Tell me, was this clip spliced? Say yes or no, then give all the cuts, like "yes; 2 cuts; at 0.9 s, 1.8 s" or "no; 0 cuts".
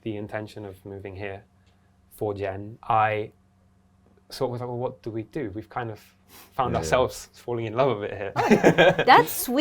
yes; 2 cuts; at 2.7 s, 8.2 s